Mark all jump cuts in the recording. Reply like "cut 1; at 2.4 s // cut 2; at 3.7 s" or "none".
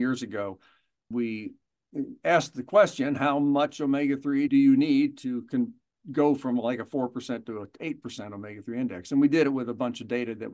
cut 1; at 1.1 s // cut 2; at 4.5 s